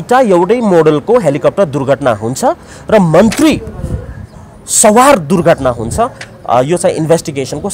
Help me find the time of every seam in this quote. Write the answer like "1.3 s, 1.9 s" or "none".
none